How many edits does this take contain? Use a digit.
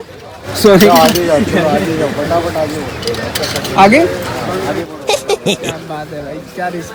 0